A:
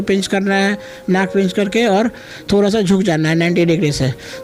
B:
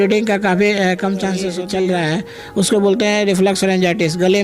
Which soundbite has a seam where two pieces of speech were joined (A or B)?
B